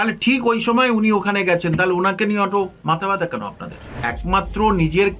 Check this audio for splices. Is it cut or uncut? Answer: cut